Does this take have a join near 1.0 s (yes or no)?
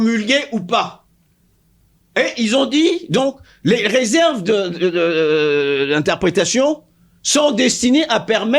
no